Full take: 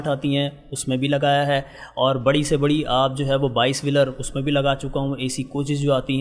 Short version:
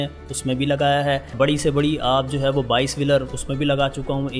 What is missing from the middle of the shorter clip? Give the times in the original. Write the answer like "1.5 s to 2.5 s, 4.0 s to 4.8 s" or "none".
1.7 s to 2.2 s